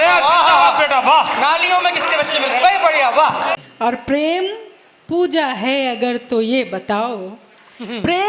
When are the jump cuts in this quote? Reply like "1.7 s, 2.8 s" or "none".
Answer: 3.6 s